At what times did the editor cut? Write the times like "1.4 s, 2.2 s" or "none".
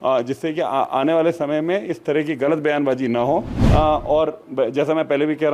3.6 s